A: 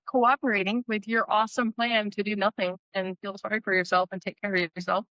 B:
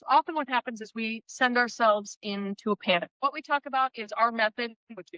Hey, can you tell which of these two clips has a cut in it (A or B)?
B